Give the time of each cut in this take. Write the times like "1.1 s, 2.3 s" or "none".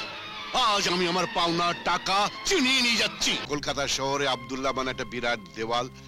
3.4 s